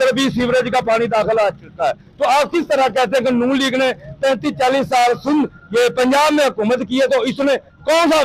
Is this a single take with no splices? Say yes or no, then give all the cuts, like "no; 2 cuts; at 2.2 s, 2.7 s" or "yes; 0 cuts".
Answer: yes; 0 cuts